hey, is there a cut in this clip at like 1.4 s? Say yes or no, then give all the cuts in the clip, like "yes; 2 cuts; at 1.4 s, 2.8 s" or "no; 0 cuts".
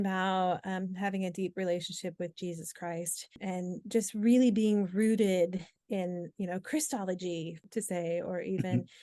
no; 3 cuts; at 3.4 s, 5.8 s, 7.6 s